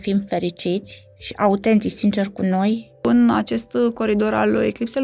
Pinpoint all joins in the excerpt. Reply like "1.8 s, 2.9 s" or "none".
3.0 s